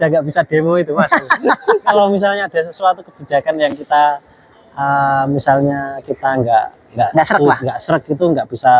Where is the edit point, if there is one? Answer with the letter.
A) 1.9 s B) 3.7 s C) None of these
A